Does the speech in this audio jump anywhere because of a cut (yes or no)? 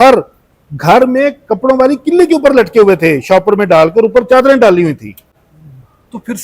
no